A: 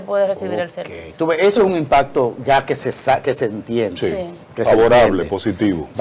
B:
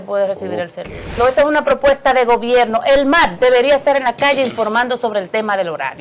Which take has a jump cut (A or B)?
B